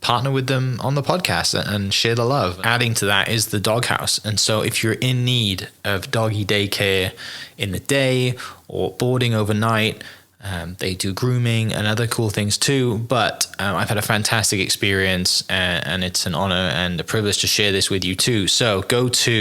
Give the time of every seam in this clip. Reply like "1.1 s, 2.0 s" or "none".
2.6 s